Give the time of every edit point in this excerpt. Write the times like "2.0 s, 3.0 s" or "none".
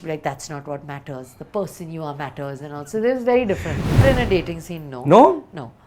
4.0 s